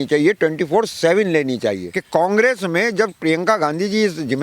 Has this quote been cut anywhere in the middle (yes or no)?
yes